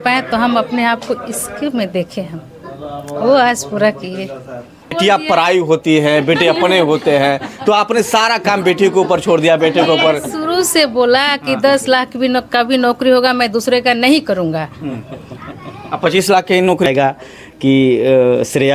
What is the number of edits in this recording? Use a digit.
2